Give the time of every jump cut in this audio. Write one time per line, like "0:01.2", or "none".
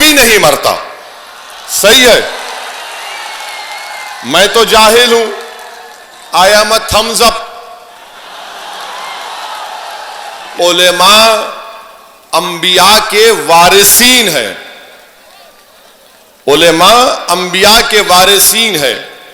0:10.5